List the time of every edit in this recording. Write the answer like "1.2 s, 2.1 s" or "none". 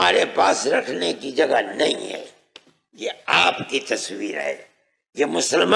none